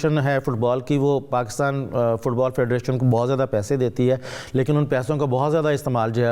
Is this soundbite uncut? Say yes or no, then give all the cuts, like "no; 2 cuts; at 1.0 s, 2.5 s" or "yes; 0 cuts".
yes; 0 cuts